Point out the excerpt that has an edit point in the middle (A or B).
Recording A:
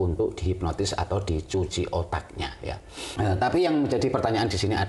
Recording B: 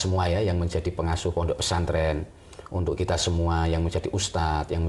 A